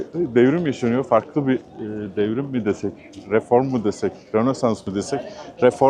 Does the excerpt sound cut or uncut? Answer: uncut